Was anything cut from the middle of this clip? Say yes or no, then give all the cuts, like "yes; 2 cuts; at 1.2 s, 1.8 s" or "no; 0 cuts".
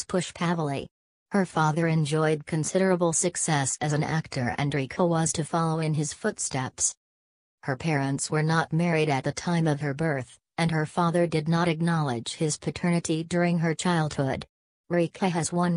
no; 0 cuts